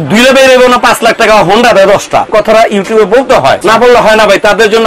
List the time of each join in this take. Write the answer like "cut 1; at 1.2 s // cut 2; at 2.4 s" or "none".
cut 1; at 2.3 s // cut 2; at 3.6 s